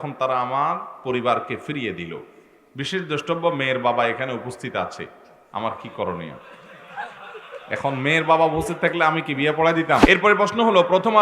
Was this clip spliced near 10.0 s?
yes; 1 cut; at 10.0 s

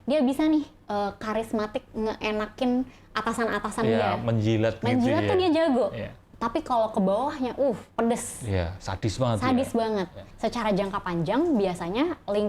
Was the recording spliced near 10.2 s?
yes; 1 cut; at 10.2 s

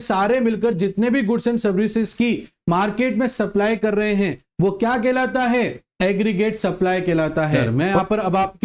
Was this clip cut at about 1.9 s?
no; 1 cut; at 7.6 s

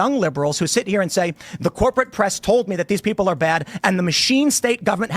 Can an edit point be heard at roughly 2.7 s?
yes; 1 cut; at 2.7 s

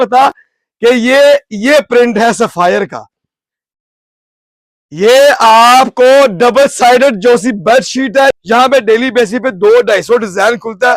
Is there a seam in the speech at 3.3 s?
no; 1 cut; at 8.3 s

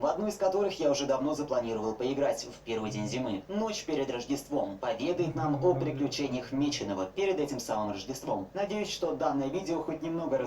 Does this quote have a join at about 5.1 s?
no; 1 cut; at 6.8 s

